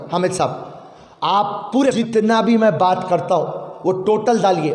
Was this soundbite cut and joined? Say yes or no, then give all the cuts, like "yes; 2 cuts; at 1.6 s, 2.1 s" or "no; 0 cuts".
yes; 1 cut; at 1.9 s